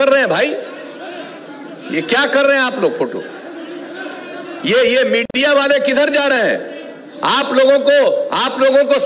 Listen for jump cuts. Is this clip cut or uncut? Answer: uncut